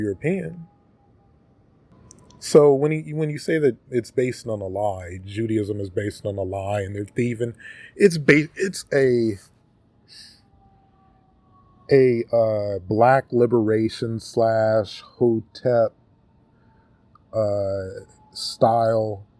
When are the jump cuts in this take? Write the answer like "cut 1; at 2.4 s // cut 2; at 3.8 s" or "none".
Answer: cut 1; at 1.9 s